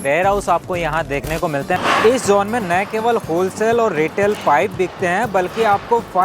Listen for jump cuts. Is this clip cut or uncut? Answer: cut